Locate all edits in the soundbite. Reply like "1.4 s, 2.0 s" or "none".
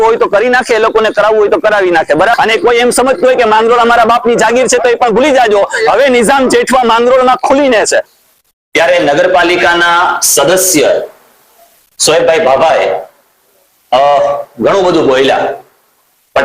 2.3 s, 8.1 s